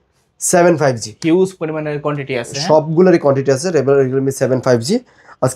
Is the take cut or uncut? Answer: uncut